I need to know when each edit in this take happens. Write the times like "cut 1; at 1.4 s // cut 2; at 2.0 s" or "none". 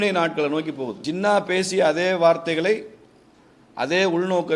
cut 1; at 1.0 s